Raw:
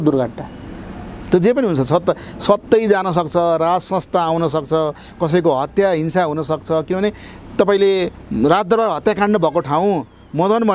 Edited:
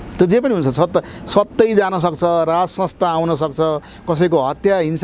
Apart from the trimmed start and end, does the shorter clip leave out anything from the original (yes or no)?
no